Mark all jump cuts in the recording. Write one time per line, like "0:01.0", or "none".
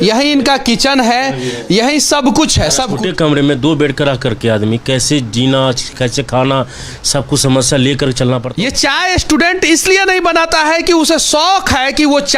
0:02.9
0:08.5